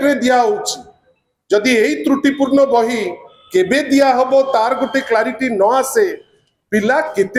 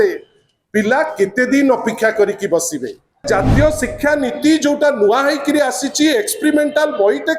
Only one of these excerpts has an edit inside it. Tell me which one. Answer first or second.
second